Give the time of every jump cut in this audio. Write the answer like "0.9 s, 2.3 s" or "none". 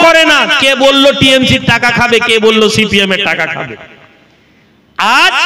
none